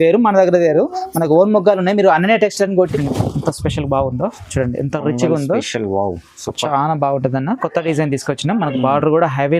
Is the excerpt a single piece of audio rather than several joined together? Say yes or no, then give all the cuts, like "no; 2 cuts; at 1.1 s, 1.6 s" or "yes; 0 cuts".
no; 1 cut; at 2.9 s